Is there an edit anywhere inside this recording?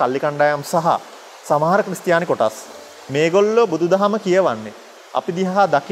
no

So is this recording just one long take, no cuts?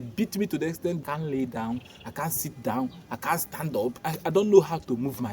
no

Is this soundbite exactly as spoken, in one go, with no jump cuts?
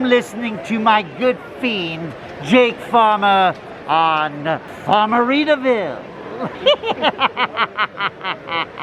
no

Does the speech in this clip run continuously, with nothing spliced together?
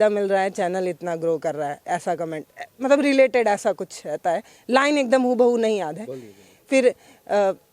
yes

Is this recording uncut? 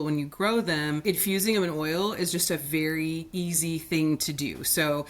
no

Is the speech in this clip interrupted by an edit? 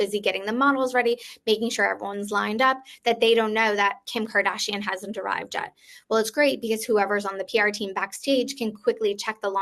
no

